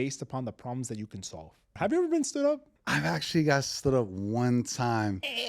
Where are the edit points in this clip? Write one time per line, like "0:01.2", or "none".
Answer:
0:01.7
0:02.7